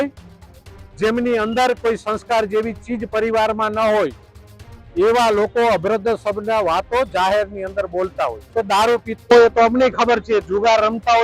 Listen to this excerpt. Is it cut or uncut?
cut